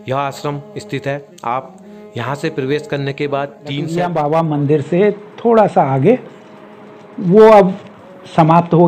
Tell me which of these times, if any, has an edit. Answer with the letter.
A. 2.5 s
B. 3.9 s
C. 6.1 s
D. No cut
B